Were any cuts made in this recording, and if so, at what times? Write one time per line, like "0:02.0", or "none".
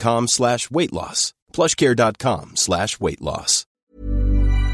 0:03.8